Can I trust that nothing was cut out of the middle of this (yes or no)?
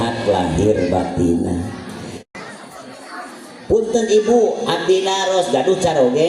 no